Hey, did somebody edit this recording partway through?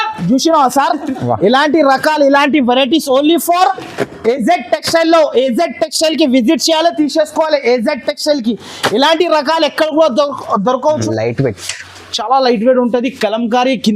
yes; 1 cut; at 11.0 s

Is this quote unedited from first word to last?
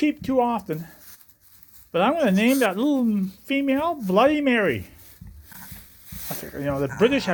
yes; 0 cuts

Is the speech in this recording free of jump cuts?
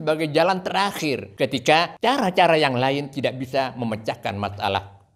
no; 2 cuts; at 1.3 s, 1.9 s

